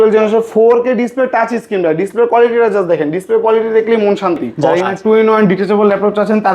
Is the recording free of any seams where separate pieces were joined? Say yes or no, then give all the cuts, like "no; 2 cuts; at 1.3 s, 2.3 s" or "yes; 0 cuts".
no; 1 cut; at 4.6 s